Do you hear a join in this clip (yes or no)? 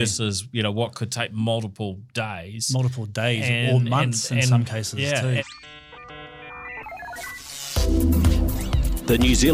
yes